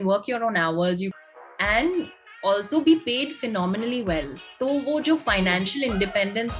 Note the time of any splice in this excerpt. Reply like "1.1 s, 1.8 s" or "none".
1.1 s